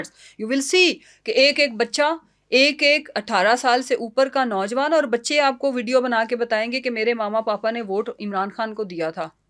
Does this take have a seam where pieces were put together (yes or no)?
no